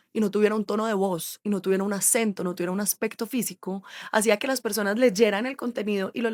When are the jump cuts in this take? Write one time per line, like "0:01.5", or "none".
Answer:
none